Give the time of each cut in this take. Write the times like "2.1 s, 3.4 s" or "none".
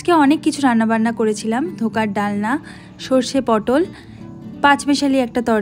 none